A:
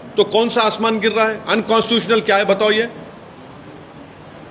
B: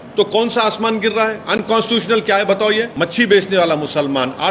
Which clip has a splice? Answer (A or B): B